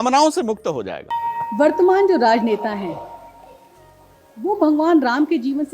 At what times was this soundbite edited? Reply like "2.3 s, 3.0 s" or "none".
1.1 s